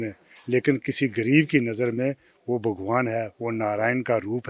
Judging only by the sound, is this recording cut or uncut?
uncut